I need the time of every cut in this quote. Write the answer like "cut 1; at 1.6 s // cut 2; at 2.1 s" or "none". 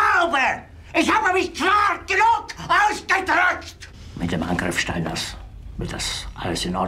cut 1; at 4.1 s